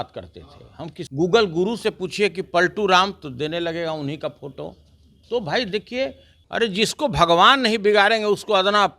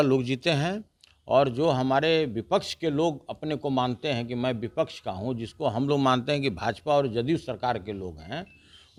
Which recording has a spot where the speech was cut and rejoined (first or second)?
first